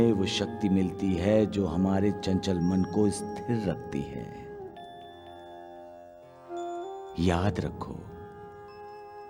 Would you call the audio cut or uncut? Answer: uncut